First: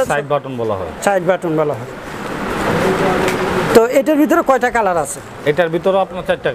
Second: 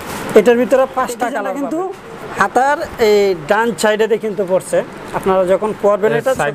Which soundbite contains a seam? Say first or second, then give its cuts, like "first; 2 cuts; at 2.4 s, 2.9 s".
second; 1 cut; at 1.5 s